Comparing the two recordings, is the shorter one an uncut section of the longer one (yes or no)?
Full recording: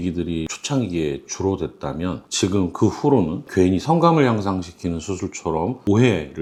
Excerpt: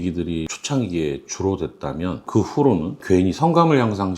no